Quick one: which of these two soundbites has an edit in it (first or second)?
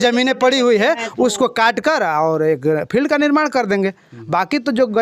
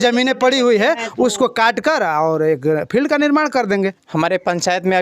second